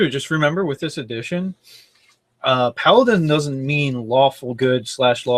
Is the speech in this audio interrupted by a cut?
no; 0 cuts

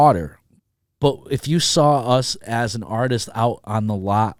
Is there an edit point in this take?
no; 0 cuts

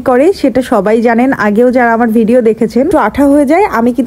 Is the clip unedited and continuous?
no; 1 cut; at 2.9 s

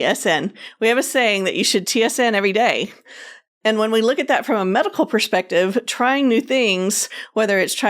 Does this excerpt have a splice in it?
no; 0 cuts

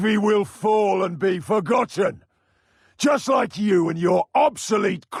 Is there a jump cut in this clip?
no; 0 cuts

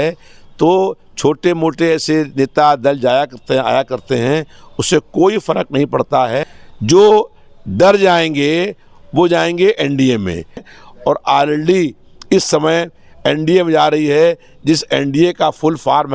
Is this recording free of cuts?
no; 2 cuts; at 6.6 s, 10.7 s

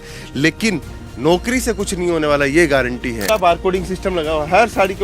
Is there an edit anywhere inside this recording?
yes; 1 cut; at 3.3 s

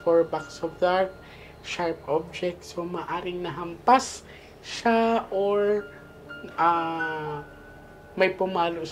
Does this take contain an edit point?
no; 0 cuts

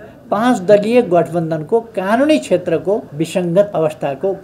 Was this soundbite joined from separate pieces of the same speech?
yes; 2 cuts; at 3.1 s, 3.7 s

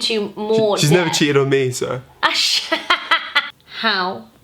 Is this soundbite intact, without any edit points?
no; 1 cut; at 3.5 s

